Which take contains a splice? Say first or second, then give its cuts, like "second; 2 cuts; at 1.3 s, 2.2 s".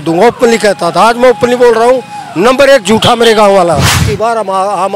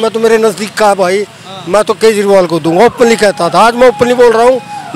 first; 1 cut; at 4.1 s